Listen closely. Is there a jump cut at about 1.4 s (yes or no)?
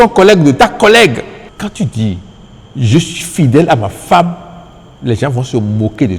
yes